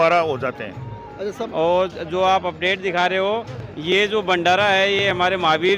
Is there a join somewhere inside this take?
yes; 1 cut; at 1.5 s

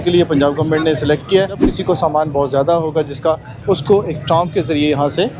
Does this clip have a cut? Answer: yes; 1 cut; at 1.7 s

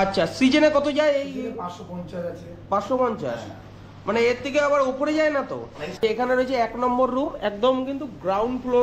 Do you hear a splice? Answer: yes; 1 cut; at 5.9 s

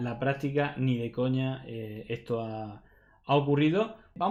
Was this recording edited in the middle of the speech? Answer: no; 0 cuts

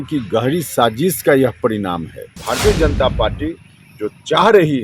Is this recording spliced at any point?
yes; 1 cut; at 2.4 s

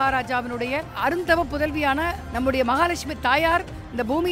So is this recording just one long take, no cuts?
no; 2 cuts; at 0.9 s, 2.2 s

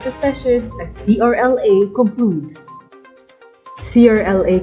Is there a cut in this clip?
yes; 2 cuts; at 2.5 s, 3.9 s

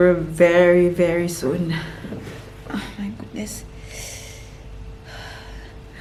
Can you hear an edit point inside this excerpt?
no; 0 cuts

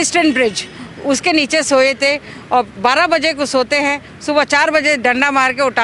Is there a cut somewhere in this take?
no; 0 cuts

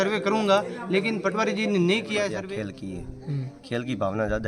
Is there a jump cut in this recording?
yes; 1 cut; at 2.4 s

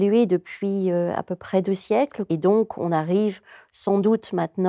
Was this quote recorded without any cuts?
no; 1 cut; at 2.2 s

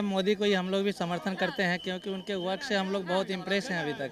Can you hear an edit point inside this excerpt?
no; 0 cuts

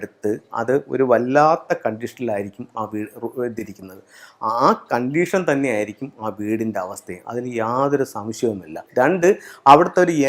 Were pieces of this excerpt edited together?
yes; 1 cut; at 8.7 s

